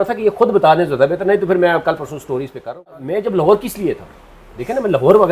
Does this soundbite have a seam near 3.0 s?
yes; 1 cut; at 3.0 s

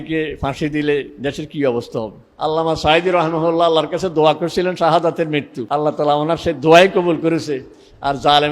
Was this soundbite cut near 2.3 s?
yes; 2 cuts; at 2.3 s, 5.6 s

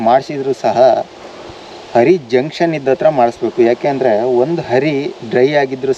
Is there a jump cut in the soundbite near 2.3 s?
no; 0 cuts

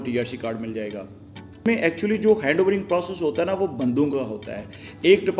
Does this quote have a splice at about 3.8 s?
no; 1 cut; at 1.6 s

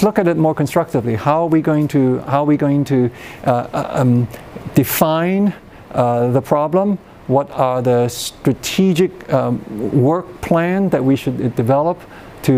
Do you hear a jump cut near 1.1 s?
no; 0 cuts

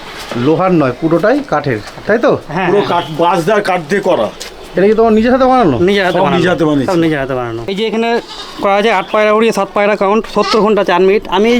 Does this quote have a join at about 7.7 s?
yes; 1 cut; at 7.7 s

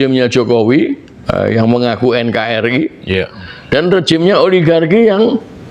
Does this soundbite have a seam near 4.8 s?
no; 1 cut; at 1.1 s

